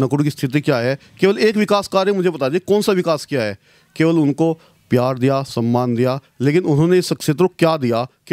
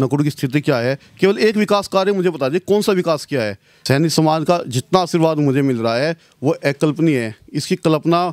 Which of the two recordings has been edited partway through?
second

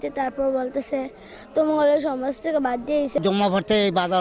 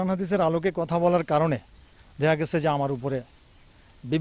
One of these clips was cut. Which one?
first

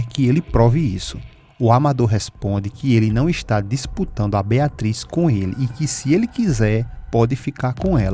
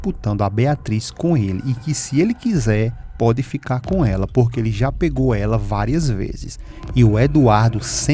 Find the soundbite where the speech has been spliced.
second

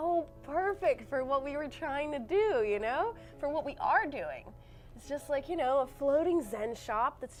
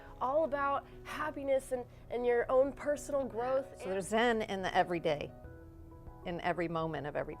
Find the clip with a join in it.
second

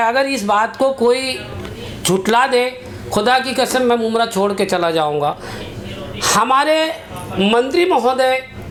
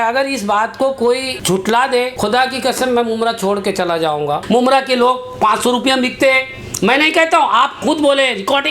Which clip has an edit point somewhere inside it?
second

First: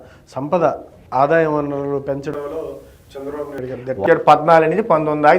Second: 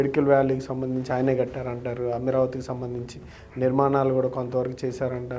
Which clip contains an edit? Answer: first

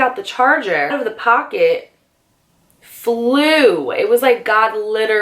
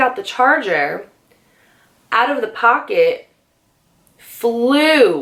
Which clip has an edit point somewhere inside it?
first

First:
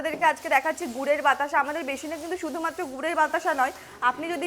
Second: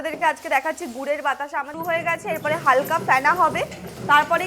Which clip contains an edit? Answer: second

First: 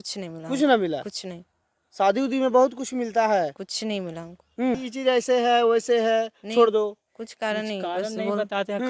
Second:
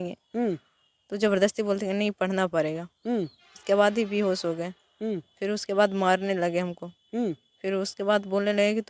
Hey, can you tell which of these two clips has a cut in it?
first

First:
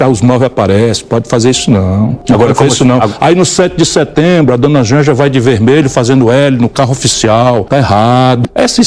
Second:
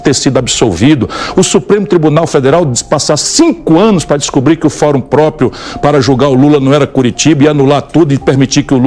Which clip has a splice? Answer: first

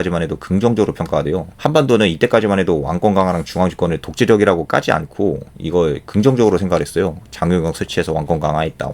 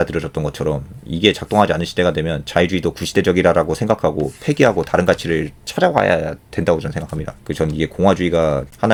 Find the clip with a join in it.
first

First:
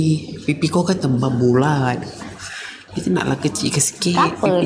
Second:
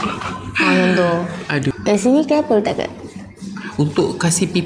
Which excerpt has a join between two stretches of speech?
second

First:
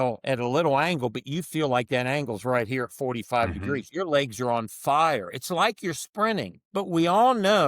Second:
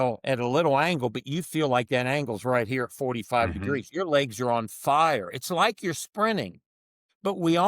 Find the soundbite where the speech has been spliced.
first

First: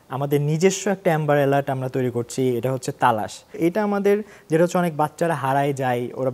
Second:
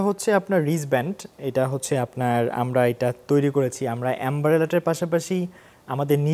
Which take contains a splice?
first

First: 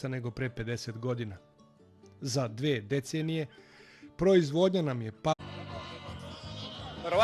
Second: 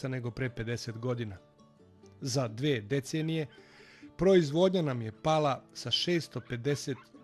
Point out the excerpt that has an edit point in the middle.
second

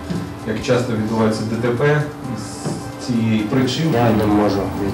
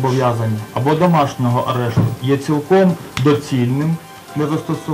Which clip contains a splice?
first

